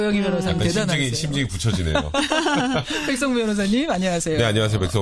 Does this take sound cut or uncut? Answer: uncut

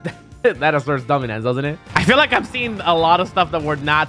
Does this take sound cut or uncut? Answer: cut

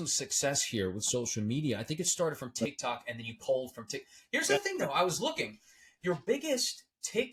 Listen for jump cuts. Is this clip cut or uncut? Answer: uncut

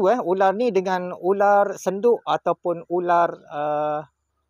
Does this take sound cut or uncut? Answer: uncut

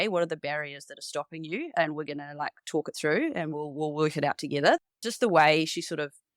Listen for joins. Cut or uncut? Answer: uncut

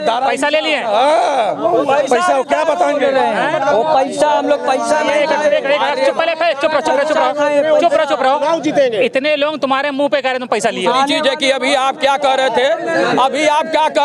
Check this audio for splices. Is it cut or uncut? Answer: uncut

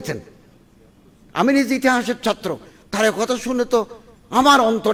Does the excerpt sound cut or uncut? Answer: uncut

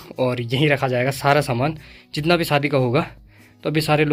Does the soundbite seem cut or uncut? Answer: uncut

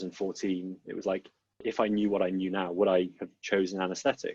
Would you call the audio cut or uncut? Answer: cut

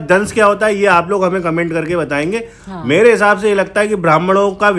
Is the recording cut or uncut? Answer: uncut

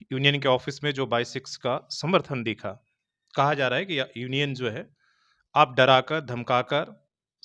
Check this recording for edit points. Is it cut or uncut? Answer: uncut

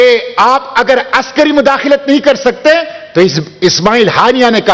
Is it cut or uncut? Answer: uncut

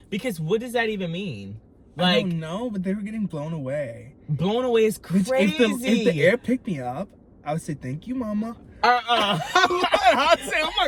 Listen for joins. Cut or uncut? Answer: uncut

